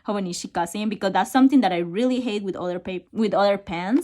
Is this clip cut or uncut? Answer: cut